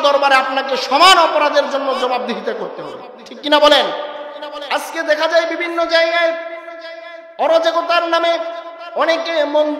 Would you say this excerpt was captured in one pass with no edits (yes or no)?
no